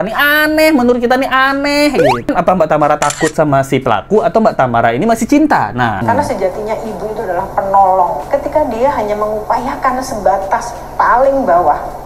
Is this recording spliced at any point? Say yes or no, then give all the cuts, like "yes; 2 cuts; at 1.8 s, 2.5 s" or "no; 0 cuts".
yes; 3 cuts; at 2.3 s, 6.0 s, 8.2 s